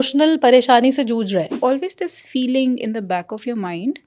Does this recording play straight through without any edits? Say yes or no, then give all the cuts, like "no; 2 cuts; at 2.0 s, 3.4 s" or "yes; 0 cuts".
no; 1 cut; at 1.5 s